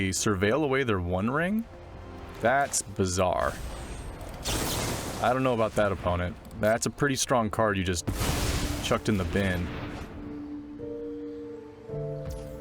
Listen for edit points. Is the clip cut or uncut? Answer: uncut